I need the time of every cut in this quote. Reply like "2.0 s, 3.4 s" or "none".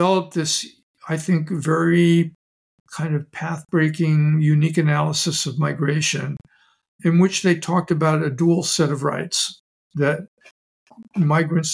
none